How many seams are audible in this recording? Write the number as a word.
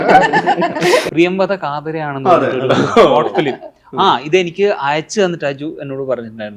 one